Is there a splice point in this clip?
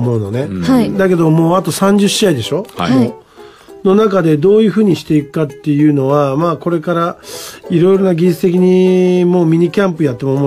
yes; 1 cut; at 5.6 s

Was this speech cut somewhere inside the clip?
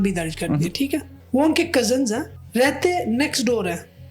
yes; 2 cuts; at 1.1 s, 2.4 s

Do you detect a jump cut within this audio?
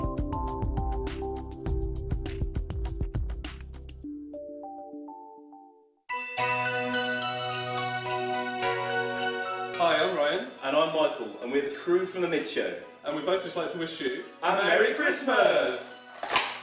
yes; 1 cut; at 9.7 s

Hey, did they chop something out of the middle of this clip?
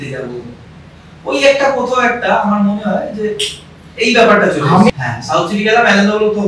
yes; 1 cut; at 4.9 s

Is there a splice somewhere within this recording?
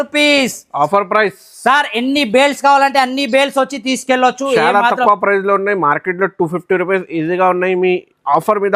no; 0 cuts

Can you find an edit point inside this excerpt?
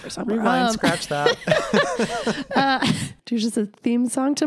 yes; 1 cut; at 3.1 s

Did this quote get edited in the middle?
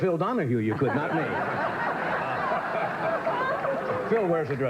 yes; 1 cut; at 0.9 s

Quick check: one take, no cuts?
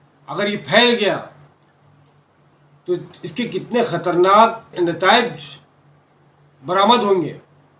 no; 1 cut; at 4.7 s

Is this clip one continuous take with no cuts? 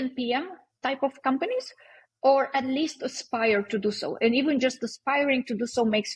yes; 0 cuts

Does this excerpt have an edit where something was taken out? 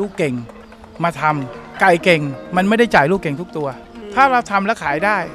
yes; 1 cut; at 4.0 s

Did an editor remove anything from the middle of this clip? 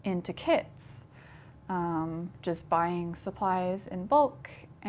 no; 0 cuts

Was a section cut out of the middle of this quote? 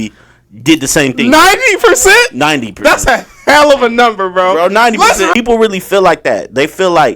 yes; 1 cut; at 5.3 s

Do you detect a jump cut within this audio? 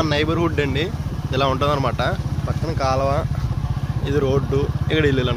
no; 0 cuts

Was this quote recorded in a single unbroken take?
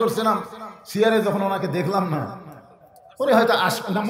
yes; 0 cuts

